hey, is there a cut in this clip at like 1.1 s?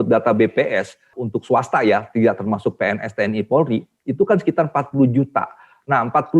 yes; 1 cut; at 1.1 s

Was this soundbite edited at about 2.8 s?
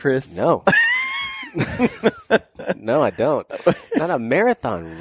no; 0 cuts

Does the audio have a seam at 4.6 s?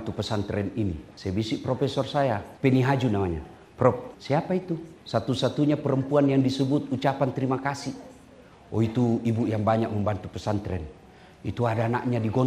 yes; 3 cuts; at 1.1 s, 2.5 s, 4.6 s

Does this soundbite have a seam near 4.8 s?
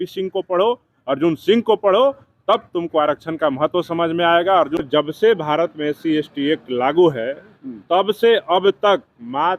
yes; 1 cut; at 4.8 s

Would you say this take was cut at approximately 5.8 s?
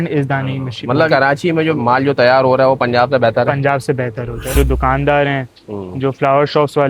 no; 2 cuts; at 1.1 s, 4.5 s

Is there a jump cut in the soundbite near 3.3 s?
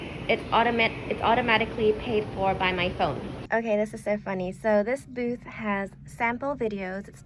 yes; 1 cut; at 3.3 s

